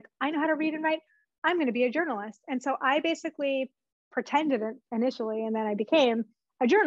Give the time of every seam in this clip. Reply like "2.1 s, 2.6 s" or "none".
none